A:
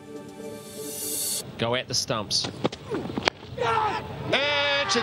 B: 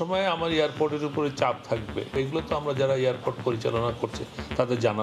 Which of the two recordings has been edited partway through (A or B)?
B